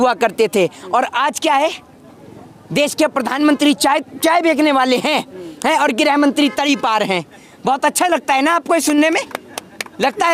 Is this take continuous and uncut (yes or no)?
yes